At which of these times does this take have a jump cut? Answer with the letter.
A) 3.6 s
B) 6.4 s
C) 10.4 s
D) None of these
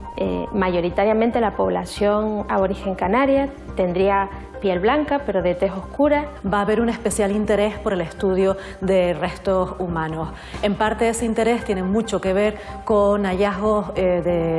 B